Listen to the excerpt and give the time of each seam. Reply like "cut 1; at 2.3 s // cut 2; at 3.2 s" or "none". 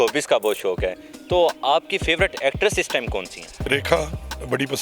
cut 1; at 3.7 s